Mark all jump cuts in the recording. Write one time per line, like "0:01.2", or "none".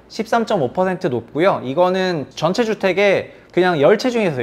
0:02.3
0:03.4